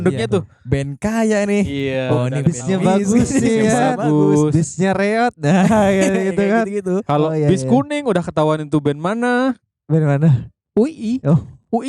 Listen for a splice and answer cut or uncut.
uncut